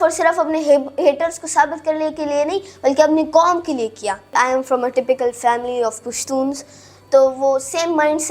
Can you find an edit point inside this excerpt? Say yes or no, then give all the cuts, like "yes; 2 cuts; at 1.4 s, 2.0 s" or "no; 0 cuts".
yes; 1 cut; at 4.3 s